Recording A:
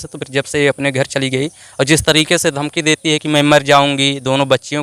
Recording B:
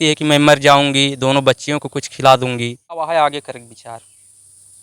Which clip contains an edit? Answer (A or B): B